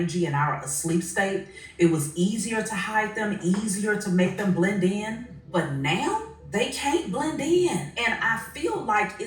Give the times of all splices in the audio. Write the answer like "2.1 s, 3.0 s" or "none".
5.3 s, 6.4 s, 7.9 s